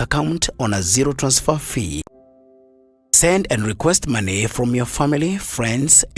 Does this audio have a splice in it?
yes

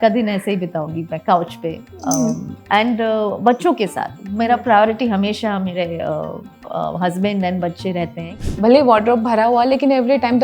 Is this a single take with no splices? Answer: no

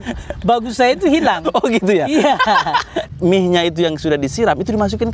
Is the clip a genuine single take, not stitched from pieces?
no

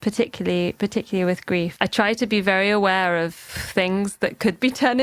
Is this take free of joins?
no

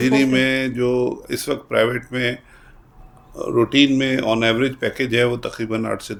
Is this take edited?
no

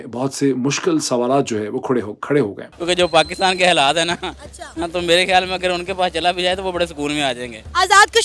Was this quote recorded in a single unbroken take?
no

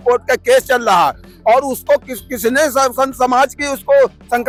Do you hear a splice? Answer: no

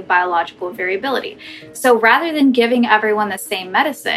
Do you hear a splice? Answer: no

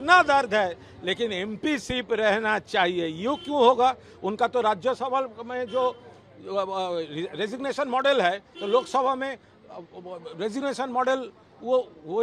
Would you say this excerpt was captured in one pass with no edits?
yes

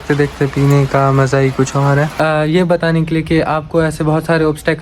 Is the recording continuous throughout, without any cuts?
no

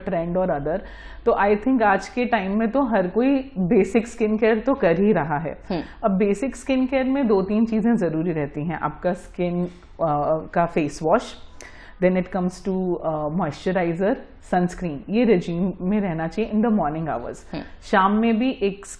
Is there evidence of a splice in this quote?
no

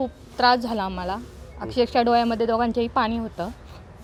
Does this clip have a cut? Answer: no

